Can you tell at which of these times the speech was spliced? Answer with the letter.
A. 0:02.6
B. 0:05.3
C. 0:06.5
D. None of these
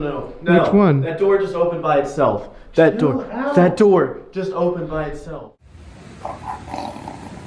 B